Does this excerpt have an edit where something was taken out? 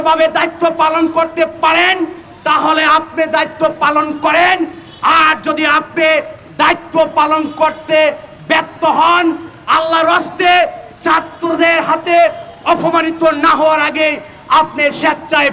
no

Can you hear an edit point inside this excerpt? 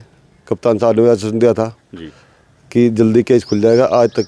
no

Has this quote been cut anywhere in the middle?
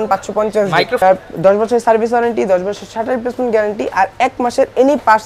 yes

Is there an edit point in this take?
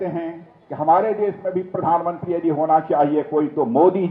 no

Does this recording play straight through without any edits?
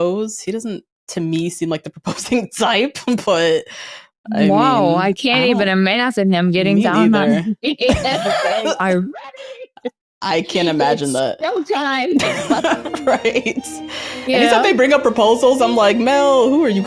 yes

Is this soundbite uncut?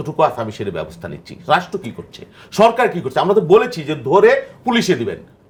yes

